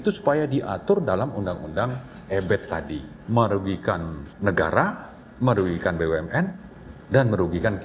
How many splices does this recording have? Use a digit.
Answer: 2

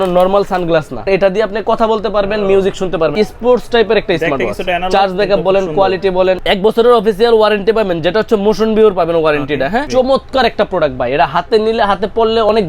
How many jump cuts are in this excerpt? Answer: 4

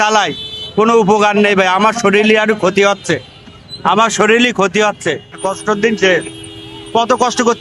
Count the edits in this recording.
1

